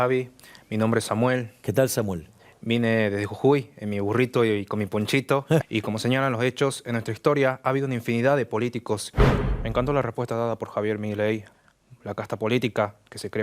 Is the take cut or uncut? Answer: cut